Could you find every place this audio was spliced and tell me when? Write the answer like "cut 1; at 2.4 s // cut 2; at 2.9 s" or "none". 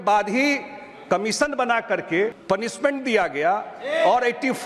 cut 1; at 2.4 s

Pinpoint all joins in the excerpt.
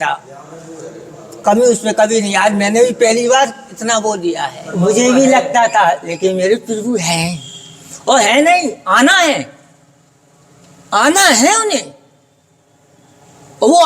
cut 1; at 4.6 s

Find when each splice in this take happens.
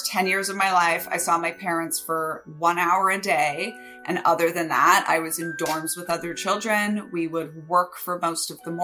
none

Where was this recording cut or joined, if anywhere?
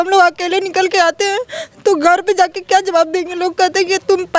none

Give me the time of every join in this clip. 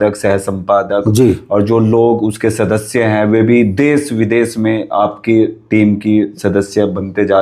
none

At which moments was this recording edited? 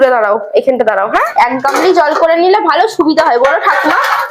cut 1; at 1.3 s

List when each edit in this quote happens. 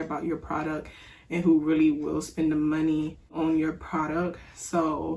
cut 1; at 3.3 s

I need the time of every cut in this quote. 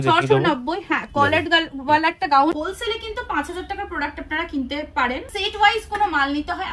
cut 1; at 2.5 s // cut 2; at 5.3 s

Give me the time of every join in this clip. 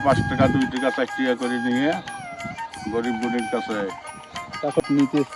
cut 1; at 4.3 s

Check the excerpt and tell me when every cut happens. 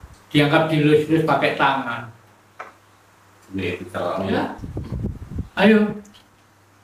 cut 1; at 4.6 s

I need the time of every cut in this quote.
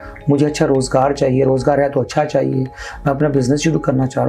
none

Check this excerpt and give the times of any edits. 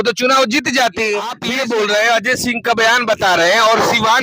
cut 1; at 1.4 s

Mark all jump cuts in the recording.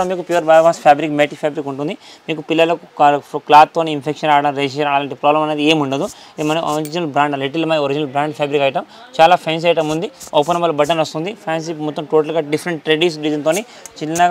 none

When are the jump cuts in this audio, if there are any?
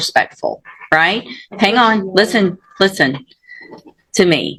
none

